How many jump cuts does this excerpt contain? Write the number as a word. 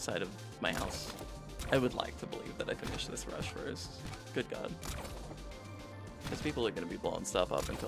one